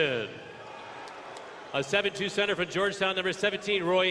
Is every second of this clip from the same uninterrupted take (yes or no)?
yes